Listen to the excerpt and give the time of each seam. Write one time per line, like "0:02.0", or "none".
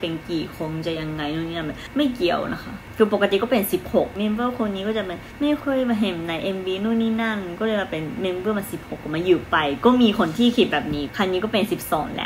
0:01.8
0:02.8
0:04.1
0:05.5
0:11.1